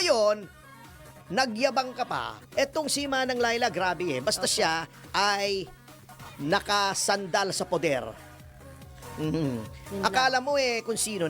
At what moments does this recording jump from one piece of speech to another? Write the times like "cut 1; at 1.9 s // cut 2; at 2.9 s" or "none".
none